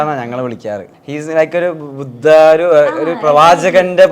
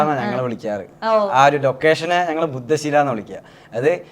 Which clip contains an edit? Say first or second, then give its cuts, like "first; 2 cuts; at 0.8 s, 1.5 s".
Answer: first; 1 cut; at 0.9 s